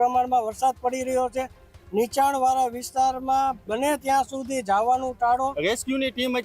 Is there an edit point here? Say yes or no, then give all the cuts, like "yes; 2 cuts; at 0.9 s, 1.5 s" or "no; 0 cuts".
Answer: yes; 1 cut; at 5.6 s